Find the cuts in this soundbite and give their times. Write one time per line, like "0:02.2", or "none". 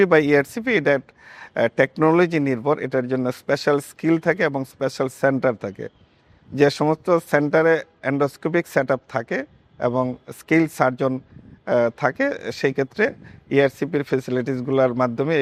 none